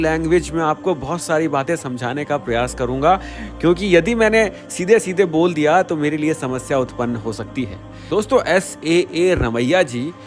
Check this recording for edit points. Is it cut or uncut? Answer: uncut